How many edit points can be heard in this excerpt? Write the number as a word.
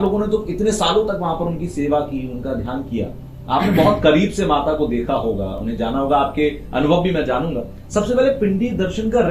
zero